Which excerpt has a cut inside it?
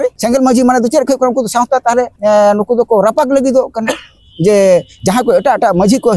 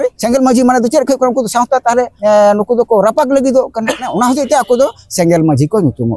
second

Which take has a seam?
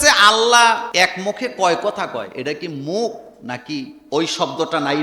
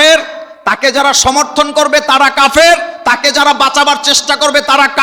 first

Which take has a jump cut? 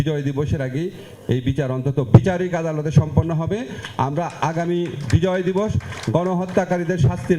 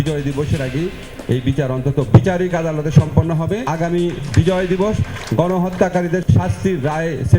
second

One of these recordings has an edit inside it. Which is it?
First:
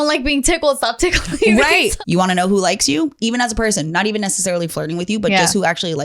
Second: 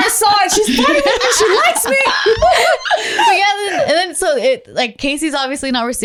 first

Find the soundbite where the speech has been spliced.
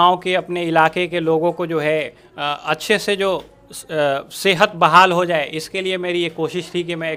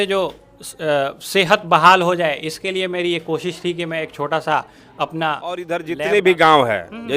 second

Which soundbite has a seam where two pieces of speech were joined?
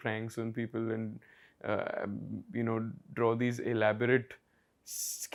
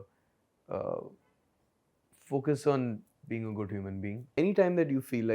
second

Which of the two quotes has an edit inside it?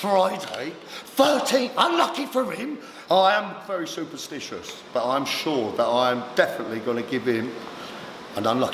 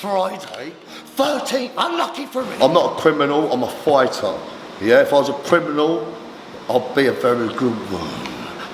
second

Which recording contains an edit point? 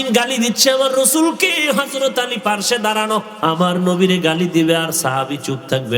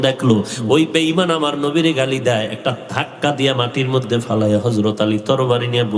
first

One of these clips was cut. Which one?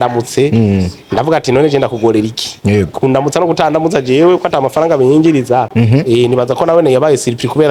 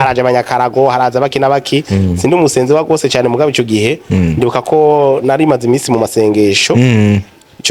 first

